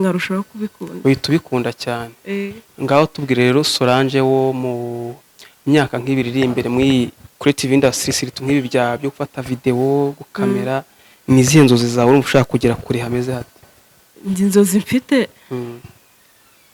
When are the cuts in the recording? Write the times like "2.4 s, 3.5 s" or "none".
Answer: none